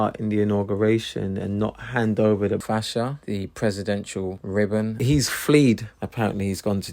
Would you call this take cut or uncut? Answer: uncut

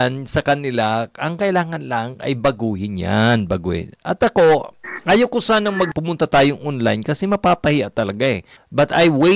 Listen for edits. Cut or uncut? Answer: uncut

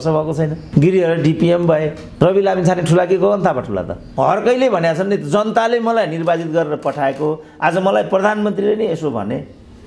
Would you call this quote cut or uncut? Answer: cut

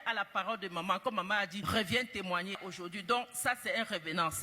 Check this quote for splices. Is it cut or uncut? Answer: cut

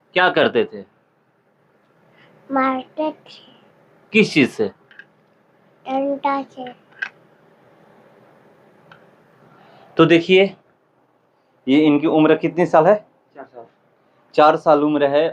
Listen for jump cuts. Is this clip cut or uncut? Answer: uncut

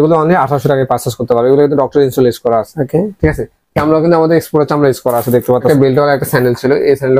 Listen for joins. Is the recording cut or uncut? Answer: cut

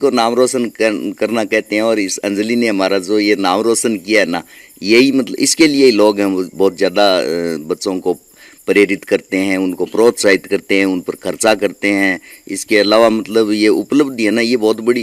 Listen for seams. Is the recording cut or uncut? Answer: uncut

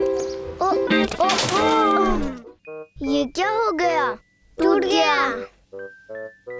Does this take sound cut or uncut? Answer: uncut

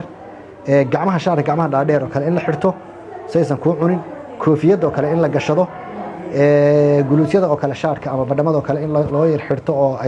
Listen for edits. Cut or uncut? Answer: uncut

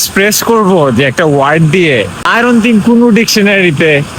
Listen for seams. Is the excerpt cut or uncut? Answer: uncut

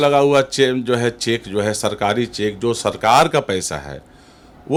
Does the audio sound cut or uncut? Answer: uncut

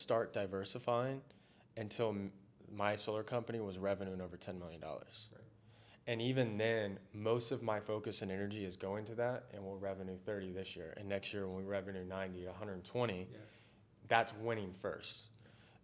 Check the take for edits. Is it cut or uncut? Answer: uncut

